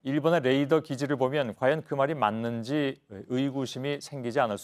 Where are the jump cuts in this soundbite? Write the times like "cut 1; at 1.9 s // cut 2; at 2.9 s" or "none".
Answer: none